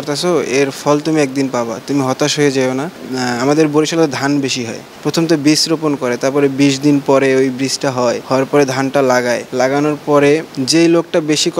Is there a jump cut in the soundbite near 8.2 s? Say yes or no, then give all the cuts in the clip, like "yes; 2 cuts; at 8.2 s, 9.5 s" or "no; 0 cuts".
yes; 5 cuts; at 3.0 s, 4.8 s, 8.2 s, 9.5 s, 10.5 s